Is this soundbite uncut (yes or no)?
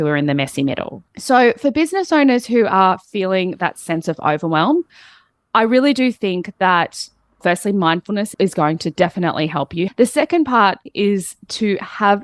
no